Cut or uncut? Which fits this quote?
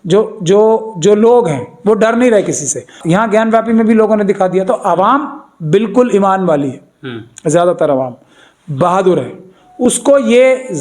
cut